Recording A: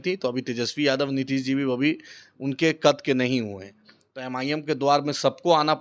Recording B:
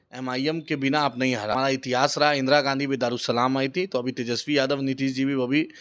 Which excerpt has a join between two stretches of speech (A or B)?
B